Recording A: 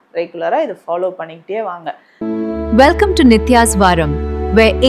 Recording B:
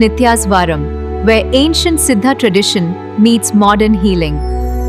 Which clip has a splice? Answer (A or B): A